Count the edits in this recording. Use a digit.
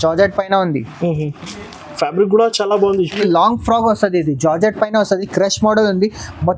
1